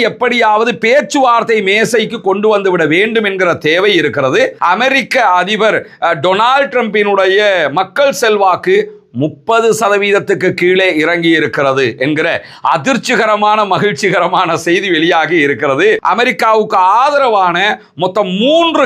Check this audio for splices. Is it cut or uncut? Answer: cut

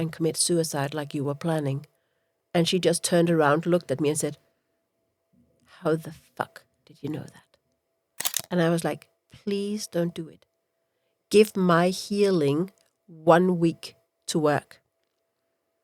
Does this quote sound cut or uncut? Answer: uncut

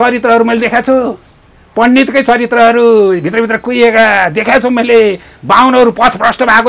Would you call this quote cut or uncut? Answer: uncut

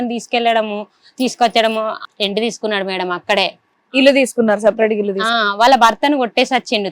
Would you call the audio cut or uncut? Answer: cut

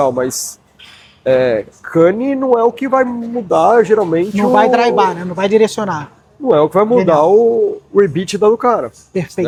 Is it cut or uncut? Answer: uncut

